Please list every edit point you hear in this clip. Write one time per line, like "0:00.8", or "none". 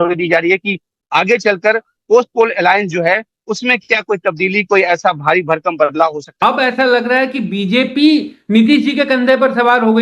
0:06.3

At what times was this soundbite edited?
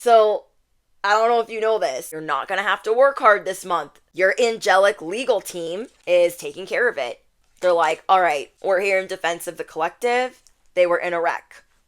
0:02.2
0:04.0
0:05.9
0:08.5

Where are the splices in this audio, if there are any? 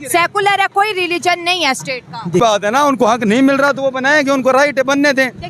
0:02.4

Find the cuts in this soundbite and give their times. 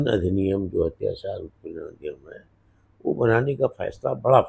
none

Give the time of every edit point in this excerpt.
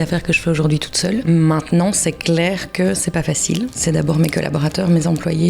0:01.2
0:03.8

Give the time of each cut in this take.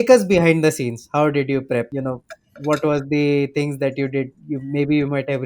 0:01.9

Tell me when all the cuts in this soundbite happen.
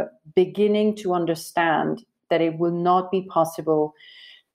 none

